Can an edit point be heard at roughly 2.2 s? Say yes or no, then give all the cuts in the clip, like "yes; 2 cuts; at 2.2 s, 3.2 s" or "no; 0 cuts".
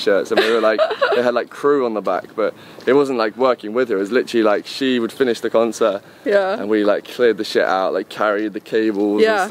no; 0 cuts